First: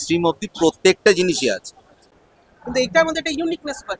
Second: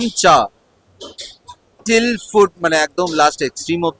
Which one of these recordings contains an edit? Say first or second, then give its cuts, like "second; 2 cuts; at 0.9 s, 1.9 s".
first; 1 cut; at 2.1 s